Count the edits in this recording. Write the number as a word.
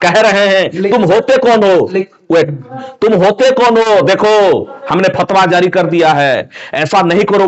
zero